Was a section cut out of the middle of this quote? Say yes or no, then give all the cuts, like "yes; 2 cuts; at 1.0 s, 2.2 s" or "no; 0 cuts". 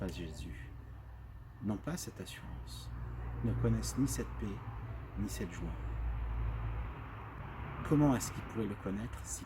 yes; 1 cut; at 7.4 s